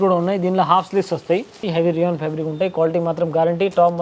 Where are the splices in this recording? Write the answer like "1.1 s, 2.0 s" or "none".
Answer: 1.6 s